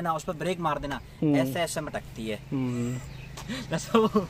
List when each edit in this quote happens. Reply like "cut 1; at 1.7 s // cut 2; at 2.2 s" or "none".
none